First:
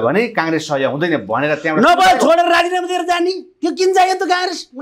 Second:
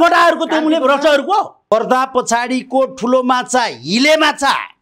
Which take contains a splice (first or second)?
second